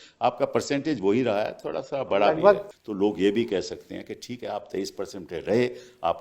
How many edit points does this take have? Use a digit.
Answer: 1